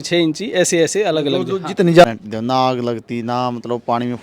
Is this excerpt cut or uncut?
cut